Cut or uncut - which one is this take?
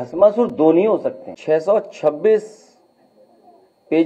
cut